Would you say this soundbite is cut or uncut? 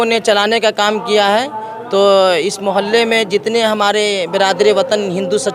uncut